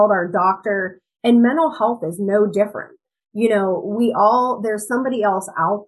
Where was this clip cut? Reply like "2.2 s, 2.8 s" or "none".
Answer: none